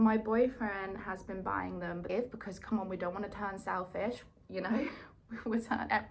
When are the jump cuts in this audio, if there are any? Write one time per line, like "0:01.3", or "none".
0:02.1